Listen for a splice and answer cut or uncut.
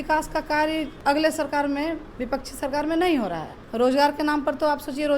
cut